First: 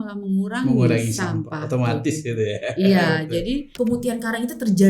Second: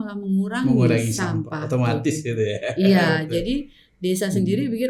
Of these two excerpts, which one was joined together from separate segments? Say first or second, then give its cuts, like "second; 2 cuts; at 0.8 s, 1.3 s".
first; 1 cut; at 3.7 s